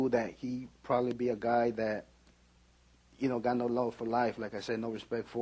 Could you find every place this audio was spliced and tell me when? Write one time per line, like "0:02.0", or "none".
0:03.4